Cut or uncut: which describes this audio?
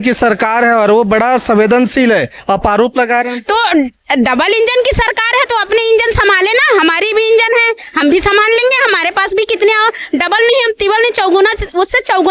uncut